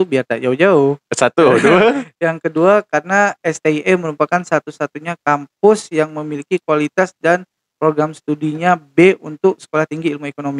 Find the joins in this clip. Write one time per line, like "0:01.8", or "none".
none